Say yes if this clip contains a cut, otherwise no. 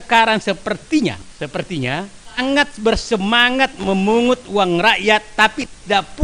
no